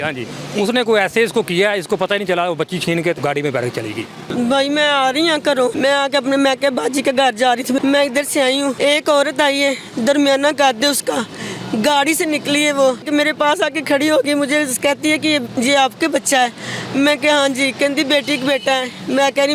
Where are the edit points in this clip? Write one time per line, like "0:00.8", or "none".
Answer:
0:03.2
0:04.2
0:05.7
0:07.8
0:08.8
0:13.0